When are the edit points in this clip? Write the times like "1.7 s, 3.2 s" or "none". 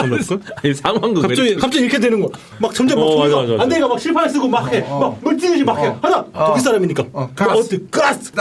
2.4 s, 6.3 s